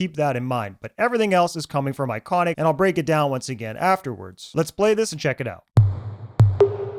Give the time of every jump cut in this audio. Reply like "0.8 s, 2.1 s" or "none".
none